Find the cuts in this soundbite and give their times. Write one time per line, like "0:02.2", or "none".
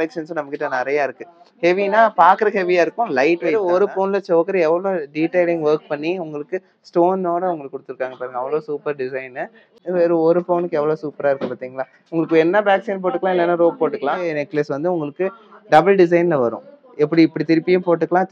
0:03.5
0:09.6
0:14.3